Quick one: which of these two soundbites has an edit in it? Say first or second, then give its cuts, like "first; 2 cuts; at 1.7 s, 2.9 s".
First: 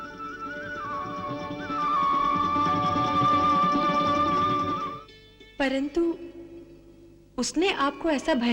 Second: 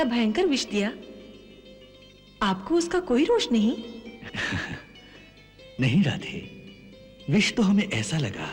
first; 1 cut; at 4.8 s